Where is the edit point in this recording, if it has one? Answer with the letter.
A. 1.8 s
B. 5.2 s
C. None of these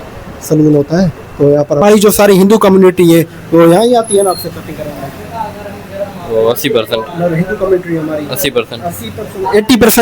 A